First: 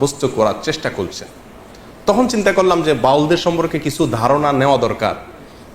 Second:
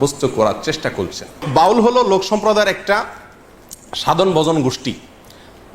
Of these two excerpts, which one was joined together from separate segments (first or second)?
second